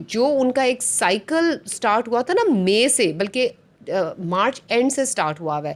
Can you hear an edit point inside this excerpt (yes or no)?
no